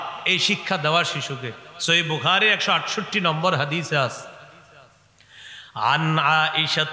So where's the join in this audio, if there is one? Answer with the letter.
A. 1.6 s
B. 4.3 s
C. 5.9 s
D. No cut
D